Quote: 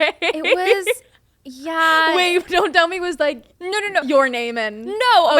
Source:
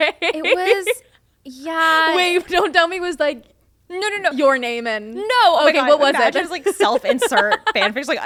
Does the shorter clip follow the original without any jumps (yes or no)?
no